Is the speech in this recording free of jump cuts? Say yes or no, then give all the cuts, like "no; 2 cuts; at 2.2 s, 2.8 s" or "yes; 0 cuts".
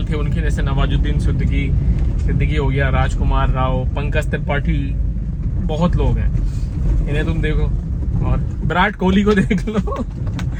yes; 0 cuts